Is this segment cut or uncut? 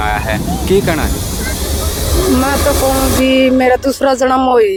uncut